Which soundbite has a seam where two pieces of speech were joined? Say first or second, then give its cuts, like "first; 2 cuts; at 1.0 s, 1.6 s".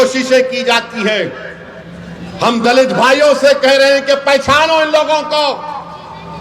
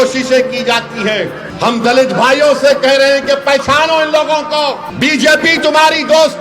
second; 2 cuts; at 1.4 s, 4.9 s